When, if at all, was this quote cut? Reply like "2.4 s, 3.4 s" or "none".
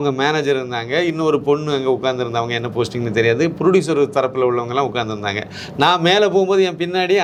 none